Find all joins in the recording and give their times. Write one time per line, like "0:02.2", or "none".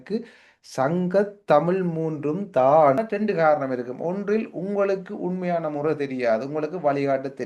0:03.0